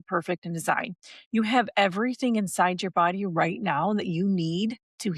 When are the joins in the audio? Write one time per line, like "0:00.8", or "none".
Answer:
none